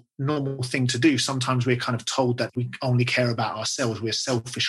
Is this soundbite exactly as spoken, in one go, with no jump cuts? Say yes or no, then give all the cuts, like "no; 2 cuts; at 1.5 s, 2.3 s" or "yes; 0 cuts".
no; 1 cut; at 2.5 s